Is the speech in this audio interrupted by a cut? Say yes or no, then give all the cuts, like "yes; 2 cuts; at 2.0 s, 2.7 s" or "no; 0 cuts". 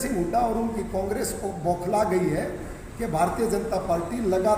no; 0 cuts